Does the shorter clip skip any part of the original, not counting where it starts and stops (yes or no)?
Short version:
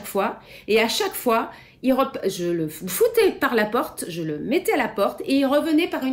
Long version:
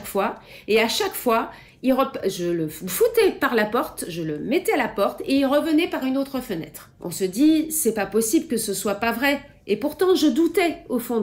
no